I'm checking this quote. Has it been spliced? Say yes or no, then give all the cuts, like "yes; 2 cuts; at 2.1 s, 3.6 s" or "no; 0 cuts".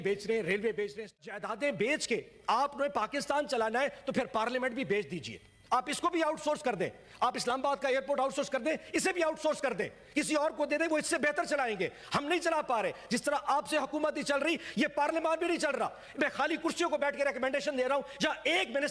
yes; 1 cut; at 1.2 s